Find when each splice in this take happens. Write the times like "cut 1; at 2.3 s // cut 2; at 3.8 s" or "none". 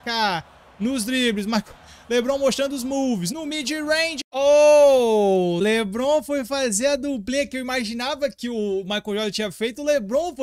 cut 1; at 4.2 s // cut 2; at 5.6 s

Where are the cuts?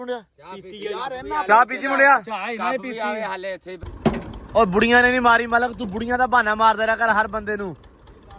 cut 1; at 3.7 s

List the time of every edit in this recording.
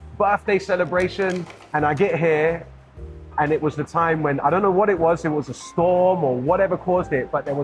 cut 1; at 1.5 s

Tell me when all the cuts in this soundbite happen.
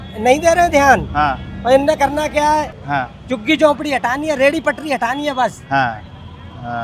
cut 1; at 2.8 s

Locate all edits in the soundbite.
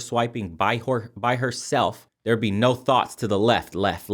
cut 1; at 2.1 s

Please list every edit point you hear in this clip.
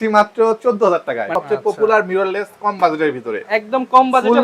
cut 1; at 1.4 s

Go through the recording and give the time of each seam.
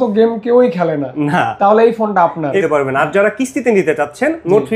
cut 1; at 2.6 s

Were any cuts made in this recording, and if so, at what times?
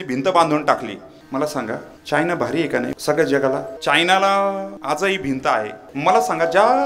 cut 1; at 1.1 s // cut 2; at 1.9 s // cut 3; at 2.9 s // cut 4; at 3.7 s // cut 5; at 4.7 s // cut 6; at 5.8 s

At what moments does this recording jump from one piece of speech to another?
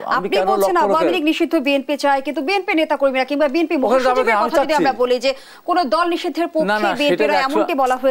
none

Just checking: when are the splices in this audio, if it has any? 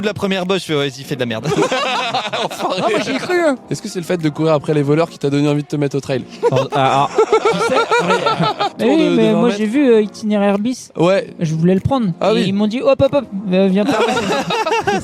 cut 1; at 3.7 s // cut 2; at 8.8 s

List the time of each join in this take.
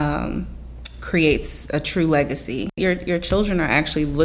cut 1; at 2.8 s

